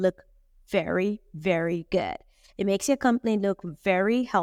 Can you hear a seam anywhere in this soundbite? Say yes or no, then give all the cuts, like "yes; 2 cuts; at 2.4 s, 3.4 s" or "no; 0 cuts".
no; 0 cuts